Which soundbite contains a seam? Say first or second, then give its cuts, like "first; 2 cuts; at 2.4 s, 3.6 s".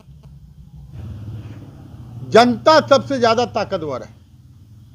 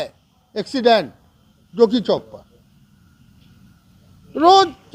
first; 1 cut; at 1.0 s